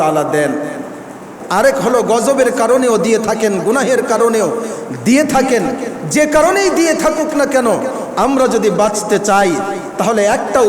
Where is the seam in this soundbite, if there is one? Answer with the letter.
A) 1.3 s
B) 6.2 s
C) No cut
A